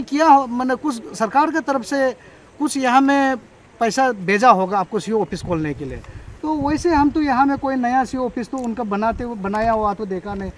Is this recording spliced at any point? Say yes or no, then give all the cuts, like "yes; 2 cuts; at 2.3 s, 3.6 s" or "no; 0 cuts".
no; 0 cuts